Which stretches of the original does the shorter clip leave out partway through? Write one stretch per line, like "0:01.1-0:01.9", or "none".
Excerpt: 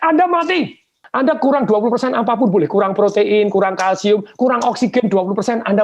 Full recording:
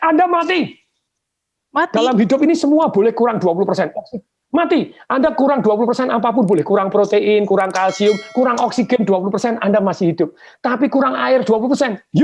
0:01.0-0:05.0